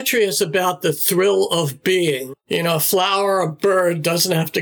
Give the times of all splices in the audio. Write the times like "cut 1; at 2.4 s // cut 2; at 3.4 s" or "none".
cut 1; at 2.3 s